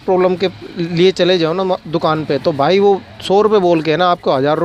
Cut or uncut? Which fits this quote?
uncut